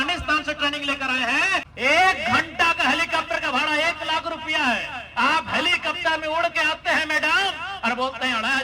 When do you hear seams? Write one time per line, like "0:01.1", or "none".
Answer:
0:01.7